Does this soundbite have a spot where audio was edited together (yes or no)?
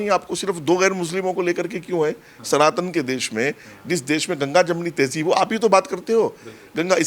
no